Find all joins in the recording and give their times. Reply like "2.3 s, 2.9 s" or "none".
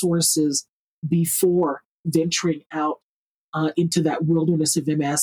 none